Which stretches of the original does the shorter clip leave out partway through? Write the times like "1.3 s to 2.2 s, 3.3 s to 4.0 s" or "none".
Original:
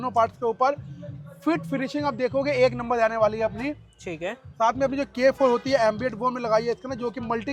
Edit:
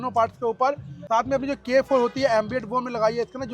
0.9 s to 4.4 s